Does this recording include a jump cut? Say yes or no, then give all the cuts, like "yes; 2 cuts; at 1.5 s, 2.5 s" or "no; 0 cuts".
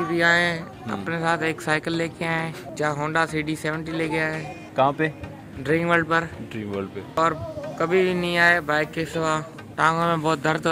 yes; 4 cuts; at 2.6 s, 4.6 s, 7.2 s, 9.6 s